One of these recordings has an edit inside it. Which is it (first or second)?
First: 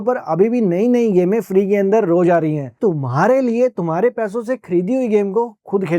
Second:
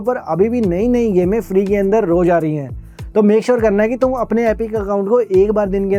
first